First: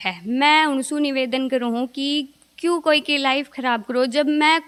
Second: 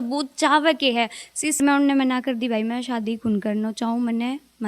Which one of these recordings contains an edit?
second; 1 cut; at 1.6 s

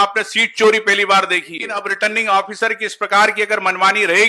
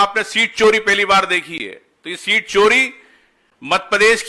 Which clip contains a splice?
first; 1 cut; at 1.8 s

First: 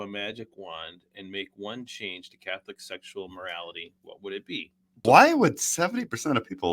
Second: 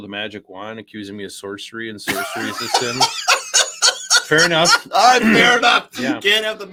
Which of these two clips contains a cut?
first; 1 cut; at 4.9 s

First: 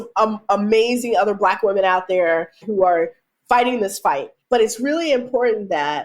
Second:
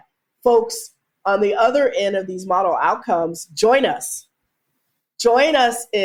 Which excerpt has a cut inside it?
first; 2 cuts; at 2.6 s, 4.3 s

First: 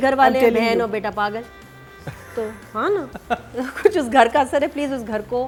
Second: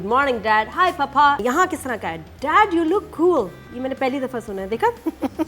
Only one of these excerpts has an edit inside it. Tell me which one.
second; 2 cuts; at 1.4 s, 3.6 s

